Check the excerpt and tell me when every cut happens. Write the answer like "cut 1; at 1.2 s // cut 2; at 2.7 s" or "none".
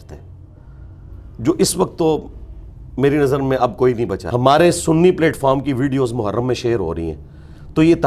cut 1; at 4.2 s